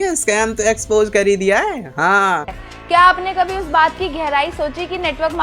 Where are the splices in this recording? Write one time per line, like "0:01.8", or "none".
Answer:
none